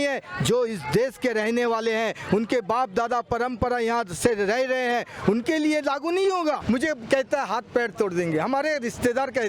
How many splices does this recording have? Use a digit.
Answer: 1